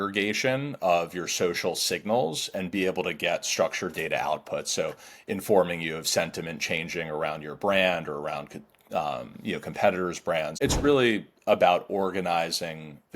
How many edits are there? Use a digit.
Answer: 1